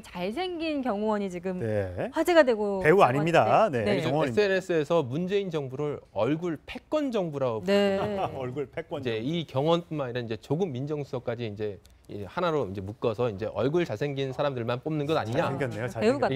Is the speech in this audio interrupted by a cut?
no; 0 cuts

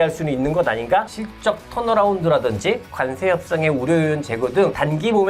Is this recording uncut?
no; 1 cut; at 1.1 s

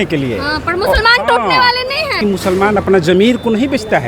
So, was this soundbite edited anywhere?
yes; 1 cut; at 2.2 s

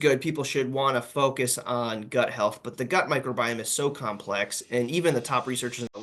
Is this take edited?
no; 0 cuts

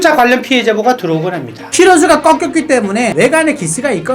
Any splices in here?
yes; 1 cut; at 1.7 s

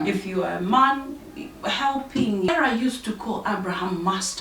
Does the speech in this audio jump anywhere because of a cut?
yes; 1 cut; at 2.5 s

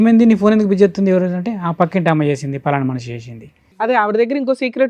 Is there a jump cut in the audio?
yes; 1 cut; at 3.9 s

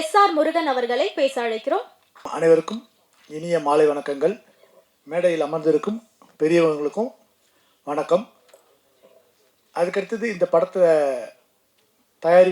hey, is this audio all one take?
no; 1 cut; at 2.3 s

